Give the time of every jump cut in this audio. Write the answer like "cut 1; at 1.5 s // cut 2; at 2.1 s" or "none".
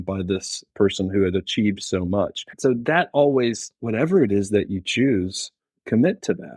cut 1; at 2.4 s // cut 2; at 3.7 s